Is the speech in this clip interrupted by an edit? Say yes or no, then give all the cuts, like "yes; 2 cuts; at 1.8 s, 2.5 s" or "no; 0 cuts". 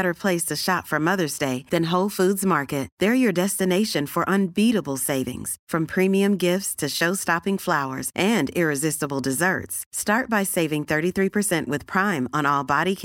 no; 0 cuts